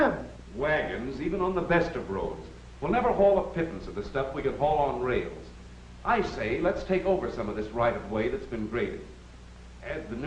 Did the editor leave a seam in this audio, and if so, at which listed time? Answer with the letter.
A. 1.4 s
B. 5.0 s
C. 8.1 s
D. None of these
D